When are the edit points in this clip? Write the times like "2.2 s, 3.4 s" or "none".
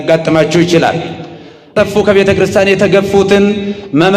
1.7 s